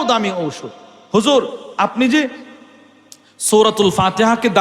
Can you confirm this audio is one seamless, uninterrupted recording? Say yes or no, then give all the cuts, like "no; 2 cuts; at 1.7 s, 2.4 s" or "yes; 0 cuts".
yes; 0 cuts